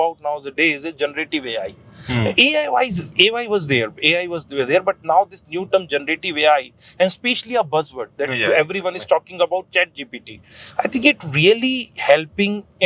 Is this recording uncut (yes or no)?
yes